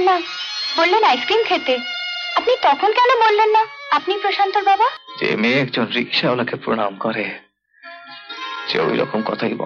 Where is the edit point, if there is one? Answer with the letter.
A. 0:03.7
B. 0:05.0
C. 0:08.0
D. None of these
B